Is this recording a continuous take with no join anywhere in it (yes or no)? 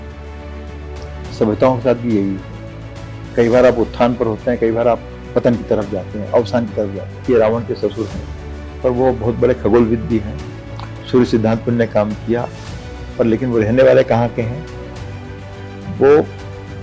no